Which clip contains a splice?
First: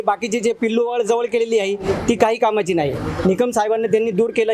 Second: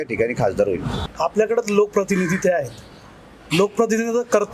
second; 1 cut; at 1.0 s

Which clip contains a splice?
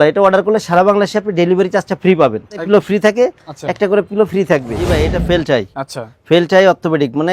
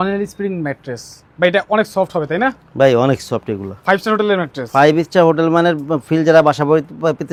first; 2 cuts; at 2.6 s, 4.9 s

